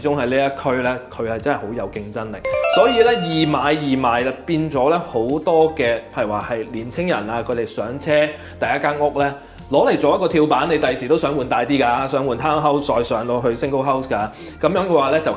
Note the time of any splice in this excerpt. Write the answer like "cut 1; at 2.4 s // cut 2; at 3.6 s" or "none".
none